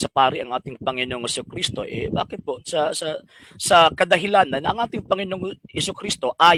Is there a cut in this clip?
no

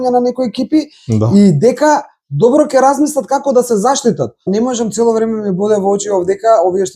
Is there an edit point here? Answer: yes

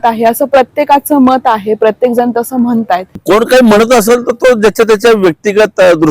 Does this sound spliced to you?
yes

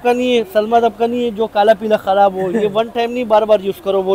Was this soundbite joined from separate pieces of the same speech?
no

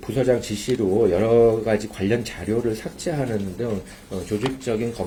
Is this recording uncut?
yes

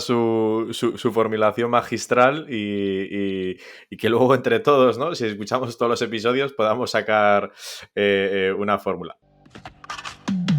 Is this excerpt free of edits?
no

